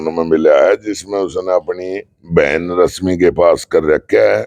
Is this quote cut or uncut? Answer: uncut